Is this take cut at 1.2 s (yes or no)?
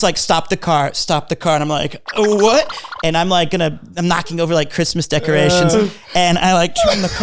no